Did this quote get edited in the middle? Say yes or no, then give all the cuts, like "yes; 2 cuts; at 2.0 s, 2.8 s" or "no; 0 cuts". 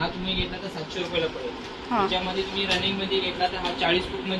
no; 0 cuts